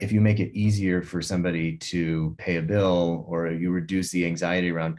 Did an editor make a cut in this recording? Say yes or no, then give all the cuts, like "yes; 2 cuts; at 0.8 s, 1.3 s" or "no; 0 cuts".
no; 0 cuts